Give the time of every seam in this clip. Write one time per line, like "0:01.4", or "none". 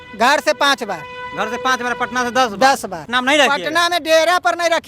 0:03.0